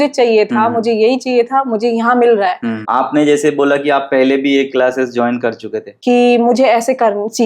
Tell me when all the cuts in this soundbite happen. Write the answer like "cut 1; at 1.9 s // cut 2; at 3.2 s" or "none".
cut 1; at 2.7 s // cut 2; at 5.9 s